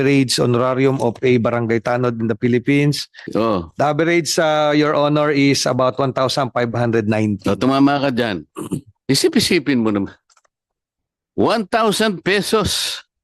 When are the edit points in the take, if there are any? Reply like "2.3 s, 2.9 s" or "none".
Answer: 3.2 s

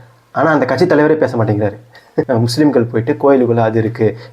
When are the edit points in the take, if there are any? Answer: 2.3 s

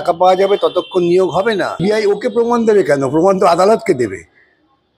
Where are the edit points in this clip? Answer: 1.8 s

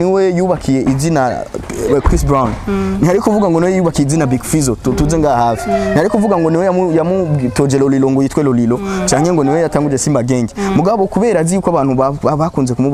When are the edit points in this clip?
none

